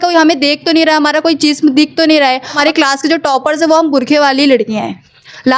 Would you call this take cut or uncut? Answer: cut